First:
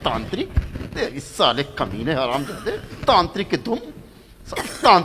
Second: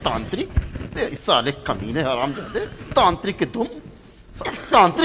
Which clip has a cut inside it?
second; 1 cut; at 1.2 s

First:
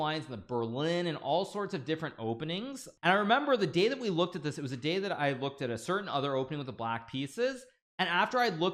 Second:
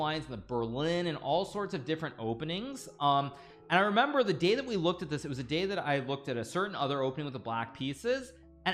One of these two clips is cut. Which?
first; 1 cut; at 2.8 s

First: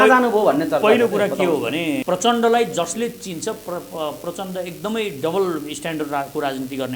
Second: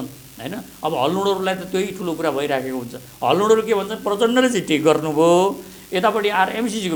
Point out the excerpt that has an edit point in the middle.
first; 1 cut; at 2.0 s

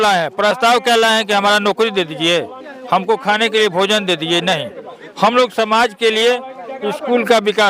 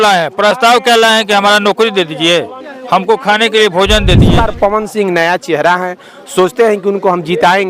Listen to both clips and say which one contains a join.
second; 1 cut; at 4.3 s

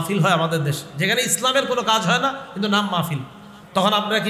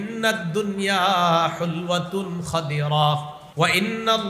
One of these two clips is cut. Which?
second; 1 cut; at 3.4 s

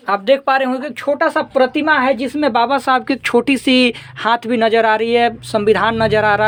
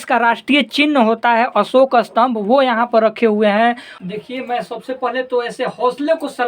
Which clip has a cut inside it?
second; 1 cut; at 3.9 s

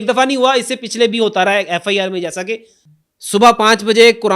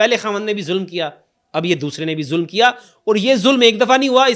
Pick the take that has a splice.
first; 1 cut; at 2.8 s

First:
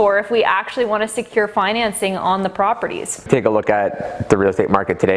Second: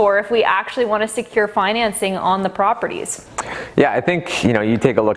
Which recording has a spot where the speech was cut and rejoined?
first; 1 cut; at 3.3 s

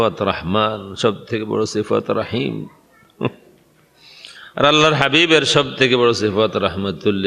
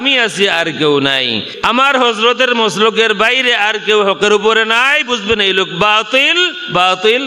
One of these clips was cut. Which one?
second; 1 cut; at 1.4 s

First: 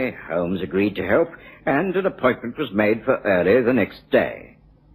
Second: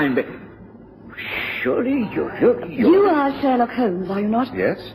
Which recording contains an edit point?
second; 1 cut; at 1.3 s

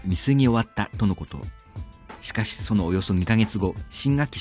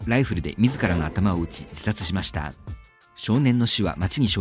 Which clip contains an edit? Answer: first; 1 cut; at 3.4 s

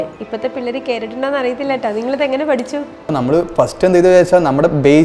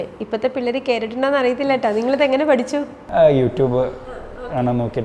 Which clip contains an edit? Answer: first; 1 cut; at 3.1 s

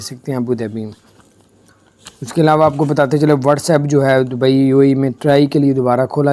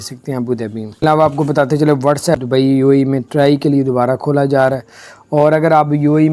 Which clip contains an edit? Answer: second; 2 cuts; at 1.0 s, 2.4 s

